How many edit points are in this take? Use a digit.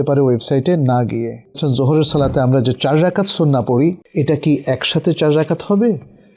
2